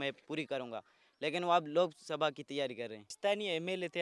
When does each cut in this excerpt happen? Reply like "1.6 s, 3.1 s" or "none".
3.0 s

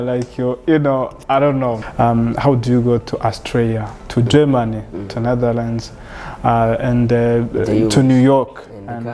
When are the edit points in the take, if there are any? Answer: 1.8 s

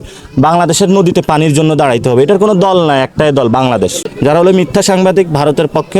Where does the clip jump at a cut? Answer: 4.0 s

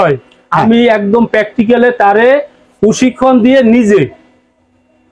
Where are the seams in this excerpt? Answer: none

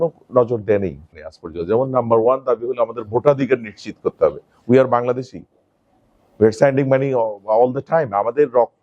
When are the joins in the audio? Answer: 1.1 s

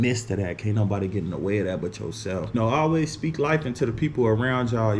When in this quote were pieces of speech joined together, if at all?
2.5 s

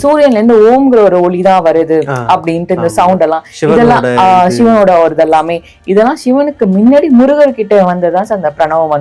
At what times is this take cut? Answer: none

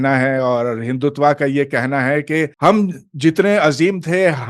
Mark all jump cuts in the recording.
2.5 s

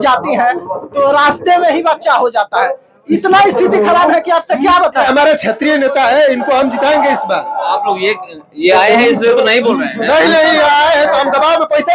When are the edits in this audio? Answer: 5.1 s

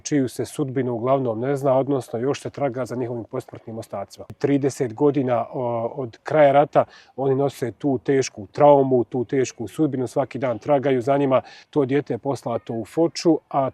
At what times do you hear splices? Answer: 4.3 s, 11.6 s

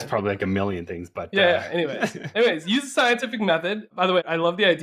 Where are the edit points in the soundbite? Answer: none

